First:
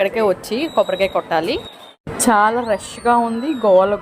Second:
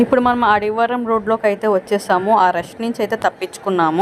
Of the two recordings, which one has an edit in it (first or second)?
first